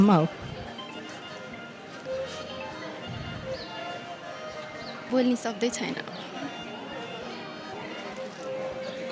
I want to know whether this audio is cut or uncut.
cut